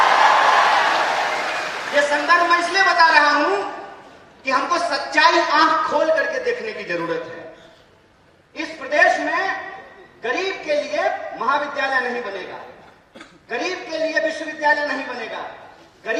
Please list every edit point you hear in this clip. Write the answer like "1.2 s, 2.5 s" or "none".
none